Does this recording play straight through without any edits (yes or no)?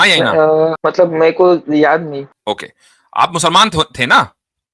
no